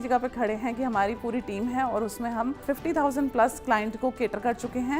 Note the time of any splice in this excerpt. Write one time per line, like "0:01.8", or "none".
0:02.6